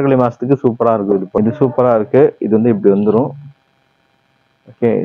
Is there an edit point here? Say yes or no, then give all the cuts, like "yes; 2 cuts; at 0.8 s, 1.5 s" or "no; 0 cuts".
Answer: yes; 1 cut; at 1.4 s